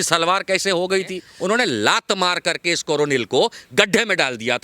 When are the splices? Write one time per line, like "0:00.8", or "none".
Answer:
0:01.2